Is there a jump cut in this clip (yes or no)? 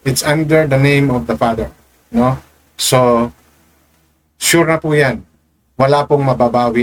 no